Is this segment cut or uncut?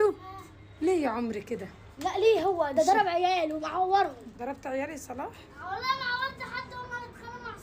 uncut